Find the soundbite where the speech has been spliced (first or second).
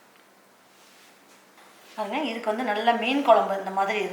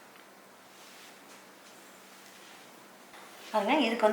first